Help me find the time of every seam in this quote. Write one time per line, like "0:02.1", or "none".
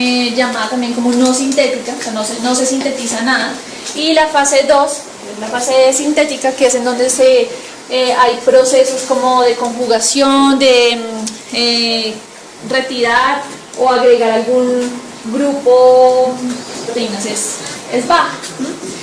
none